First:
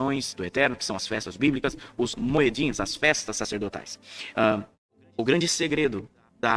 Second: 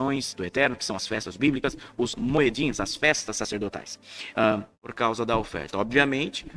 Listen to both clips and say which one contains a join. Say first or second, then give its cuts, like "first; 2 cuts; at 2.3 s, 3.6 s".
first; 1 cut; at 4.8 s